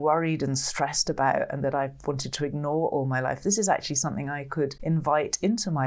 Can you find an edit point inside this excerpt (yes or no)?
yes